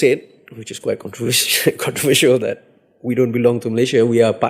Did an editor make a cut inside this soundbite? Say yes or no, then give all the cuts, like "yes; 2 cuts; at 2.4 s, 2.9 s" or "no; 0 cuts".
no; 0 cuts